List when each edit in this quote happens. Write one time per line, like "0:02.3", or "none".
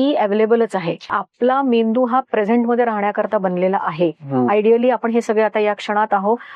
0:01.2